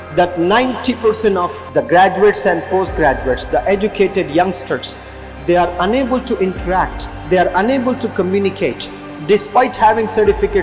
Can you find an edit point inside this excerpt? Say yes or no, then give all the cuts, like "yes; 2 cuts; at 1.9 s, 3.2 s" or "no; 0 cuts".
yes; 1 cut; at 1.6 s